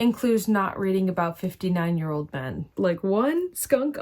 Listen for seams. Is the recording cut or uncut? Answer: cut